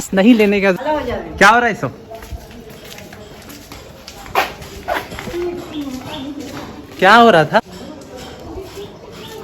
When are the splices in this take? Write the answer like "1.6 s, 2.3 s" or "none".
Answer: 0.7 s, 7.6 s

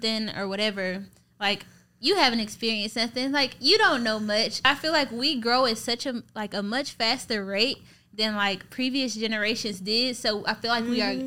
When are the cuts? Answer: 4.6 s

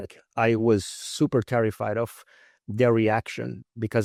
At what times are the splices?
none

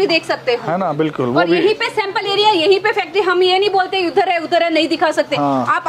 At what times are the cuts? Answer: none

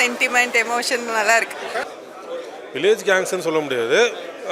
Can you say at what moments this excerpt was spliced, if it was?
1.9 s

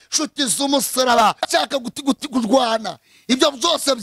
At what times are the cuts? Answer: 1.5 s

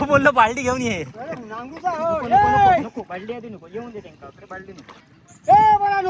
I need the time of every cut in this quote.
5.0 s

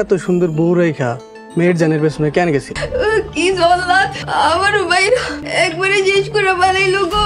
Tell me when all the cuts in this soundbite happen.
2.8 s, 4.2 s, 5.4 s

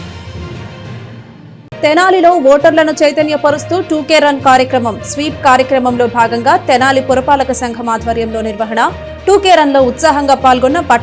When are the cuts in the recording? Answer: 1.2 s

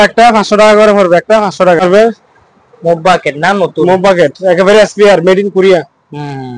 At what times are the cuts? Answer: 1.8 s

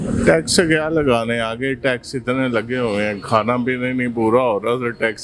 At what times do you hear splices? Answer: none

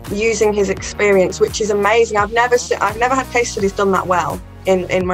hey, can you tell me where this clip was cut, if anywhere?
none

